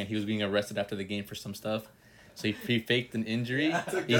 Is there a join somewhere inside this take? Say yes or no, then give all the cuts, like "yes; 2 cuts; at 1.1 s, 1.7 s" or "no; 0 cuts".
no; 0 cuts